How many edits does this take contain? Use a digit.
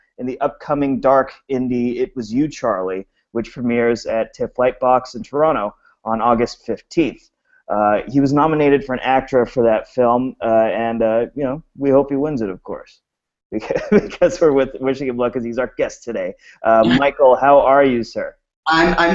1